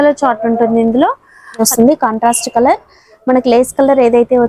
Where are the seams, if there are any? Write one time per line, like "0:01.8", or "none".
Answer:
0:01.6